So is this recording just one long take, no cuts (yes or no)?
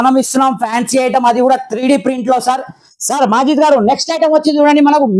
yes